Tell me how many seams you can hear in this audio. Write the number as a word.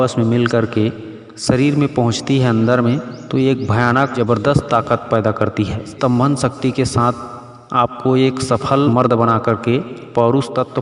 two